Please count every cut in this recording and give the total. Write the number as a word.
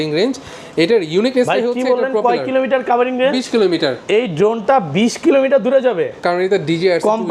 zero